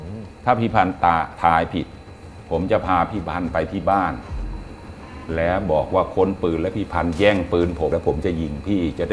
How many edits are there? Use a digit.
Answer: 1